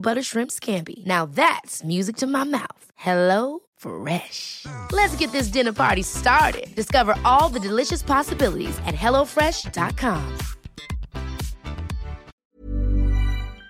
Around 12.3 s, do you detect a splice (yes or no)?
yes